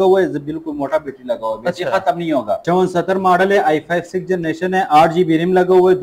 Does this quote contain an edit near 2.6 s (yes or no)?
yes